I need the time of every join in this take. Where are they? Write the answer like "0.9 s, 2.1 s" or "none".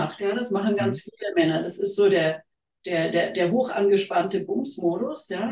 none